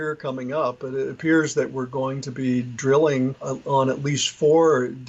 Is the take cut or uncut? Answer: cut